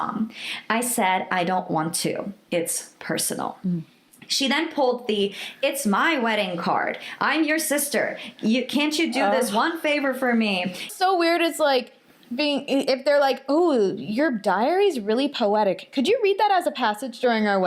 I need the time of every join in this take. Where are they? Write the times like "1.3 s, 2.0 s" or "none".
10.9 s